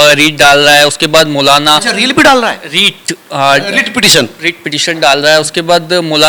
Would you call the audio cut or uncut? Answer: uncut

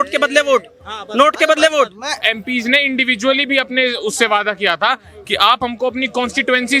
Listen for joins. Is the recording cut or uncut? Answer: cut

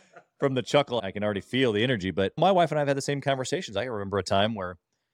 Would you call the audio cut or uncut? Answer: cut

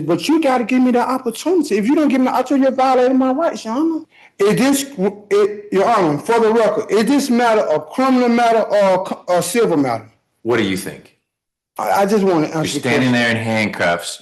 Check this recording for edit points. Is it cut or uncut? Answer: cut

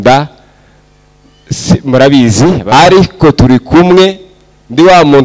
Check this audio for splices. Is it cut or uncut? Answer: cut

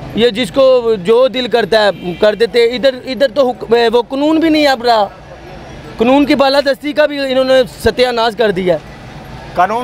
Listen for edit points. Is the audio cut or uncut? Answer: uncut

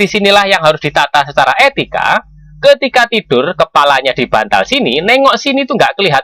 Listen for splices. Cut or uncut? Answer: uncut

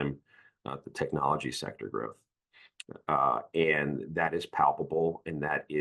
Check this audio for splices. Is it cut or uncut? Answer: uncut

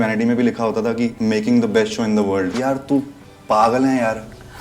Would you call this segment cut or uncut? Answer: cut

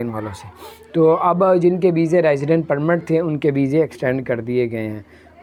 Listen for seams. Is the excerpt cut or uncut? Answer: uncut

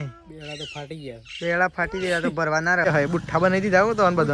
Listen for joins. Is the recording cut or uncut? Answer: cut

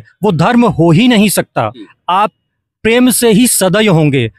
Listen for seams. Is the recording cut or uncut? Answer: cut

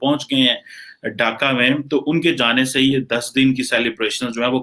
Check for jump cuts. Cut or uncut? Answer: uncut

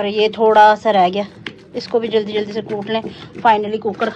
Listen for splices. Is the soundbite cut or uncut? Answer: uncut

